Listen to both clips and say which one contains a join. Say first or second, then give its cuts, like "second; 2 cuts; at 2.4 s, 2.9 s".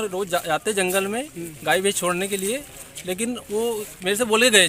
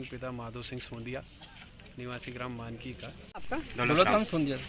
second; 1 cut; at 3.2 s